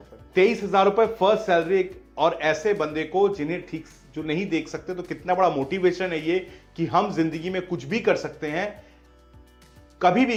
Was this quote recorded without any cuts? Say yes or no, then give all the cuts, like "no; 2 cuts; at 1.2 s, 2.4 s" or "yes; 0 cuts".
yes; 0 cuts